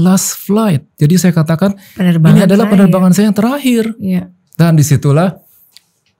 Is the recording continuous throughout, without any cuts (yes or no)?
yes